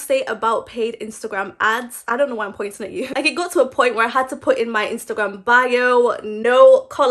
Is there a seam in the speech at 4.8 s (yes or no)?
no